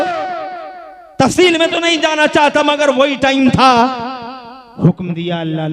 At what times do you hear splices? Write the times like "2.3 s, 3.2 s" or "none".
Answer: none